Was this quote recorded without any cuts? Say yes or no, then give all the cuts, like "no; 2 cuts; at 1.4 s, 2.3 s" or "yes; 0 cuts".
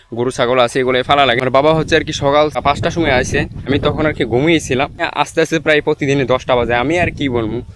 no; 4 cuts; at 1.5 s, 2.6 s, 3.7 s, 5.1 s